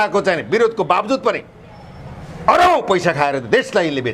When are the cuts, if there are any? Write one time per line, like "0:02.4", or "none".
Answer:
none